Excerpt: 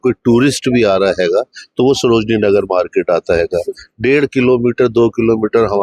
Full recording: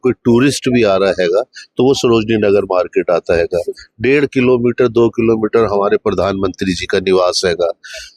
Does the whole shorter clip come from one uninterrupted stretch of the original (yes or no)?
yes